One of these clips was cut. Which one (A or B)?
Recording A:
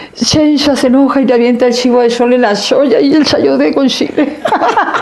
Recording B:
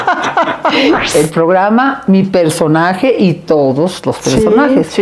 B